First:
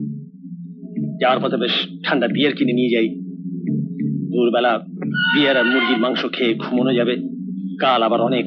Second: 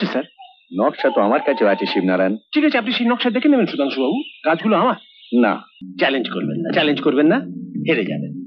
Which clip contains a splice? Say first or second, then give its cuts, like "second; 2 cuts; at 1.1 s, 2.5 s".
second; 1 cut; at 5.8 s